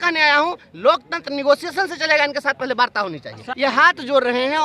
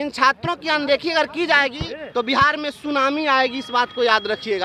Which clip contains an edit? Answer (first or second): first